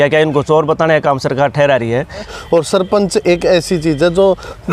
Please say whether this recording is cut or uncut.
cut